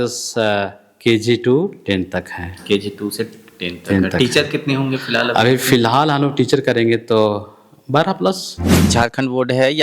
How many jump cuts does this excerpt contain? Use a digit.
1